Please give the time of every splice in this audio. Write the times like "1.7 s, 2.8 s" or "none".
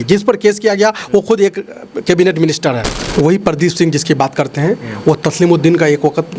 3.0 s

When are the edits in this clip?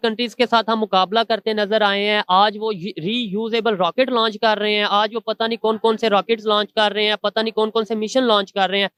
none

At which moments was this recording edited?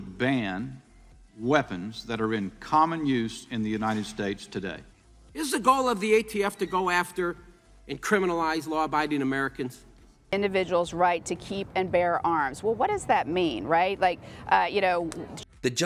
none

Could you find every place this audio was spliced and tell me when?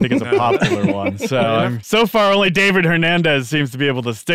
1.8 s

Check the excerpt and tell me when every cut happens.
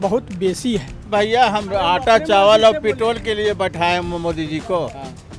1.0 s

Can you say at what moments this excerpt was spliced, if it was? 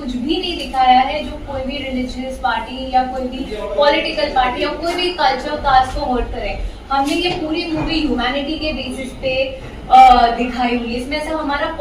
none

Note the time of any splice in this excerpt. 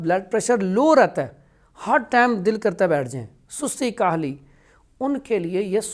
none

